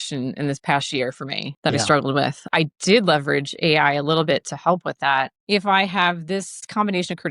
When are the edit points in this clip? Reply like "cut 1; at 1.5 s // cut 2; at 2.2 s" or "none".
cut 1; at 1.4 s // cut 2; at 2.5 s // cut 3; at 5.3 s